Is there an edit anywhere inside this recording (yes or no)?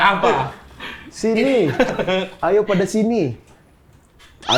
no